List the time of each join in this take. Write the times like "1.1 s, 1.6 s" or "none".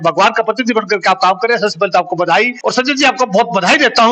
2.6 s